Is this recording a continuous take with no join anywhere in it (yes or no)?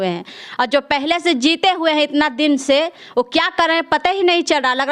yes